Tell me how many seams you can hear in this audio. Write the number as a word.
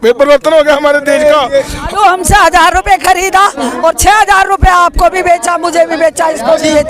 one